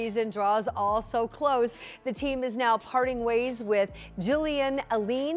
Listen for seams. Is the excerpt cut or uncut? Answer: uncut